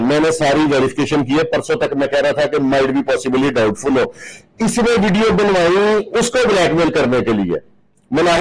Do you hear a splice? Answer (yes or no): no